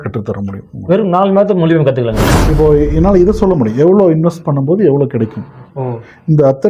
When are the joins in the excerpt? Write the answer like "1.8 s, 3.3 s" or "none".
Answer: 2.5 s